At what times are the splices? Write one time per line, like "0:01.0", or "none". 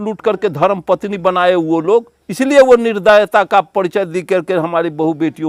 none